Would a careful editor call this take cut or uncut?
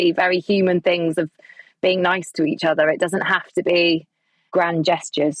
cut